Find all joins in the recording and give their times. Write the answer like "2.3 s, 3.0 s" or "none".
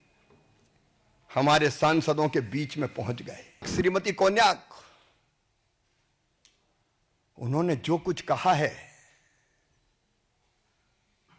3.7 s

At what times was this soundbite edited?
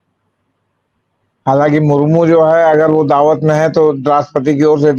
none

